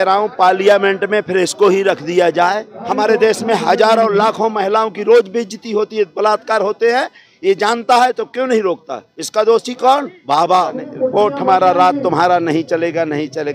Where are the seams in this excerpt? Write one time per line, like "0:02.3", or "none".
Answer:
0:02.7
0:10.9